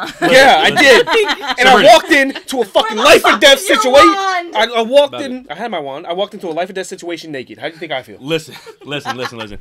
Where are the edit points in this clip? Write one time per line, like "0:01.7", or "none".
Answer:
none